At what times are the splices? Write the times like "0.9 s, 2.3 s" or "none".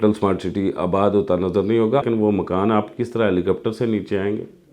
2.0 s